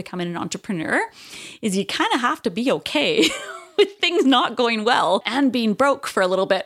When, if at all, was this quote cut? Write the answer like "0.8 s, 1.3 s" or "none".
5.3 s